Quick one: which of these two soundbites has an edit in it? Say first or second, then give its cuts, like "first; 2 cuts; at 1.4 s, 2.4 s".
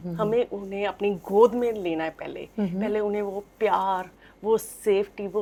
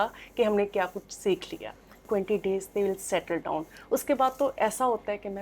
second; 1 cut; at 2.0 s